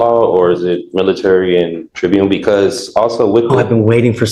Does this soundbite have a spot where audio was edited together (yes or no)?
yes